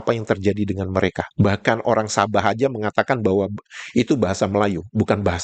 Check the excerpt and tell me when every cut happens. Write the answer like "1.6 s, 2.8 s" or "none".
none